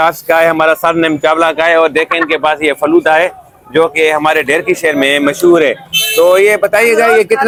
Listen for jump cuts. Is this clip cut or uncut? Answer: uncut